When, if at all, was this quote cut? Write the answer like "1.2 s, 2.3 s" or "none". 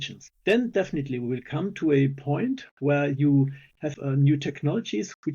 3.9 s